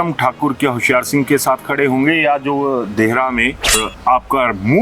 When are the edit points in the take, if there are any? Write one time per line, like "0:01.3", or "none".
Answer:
0:03.8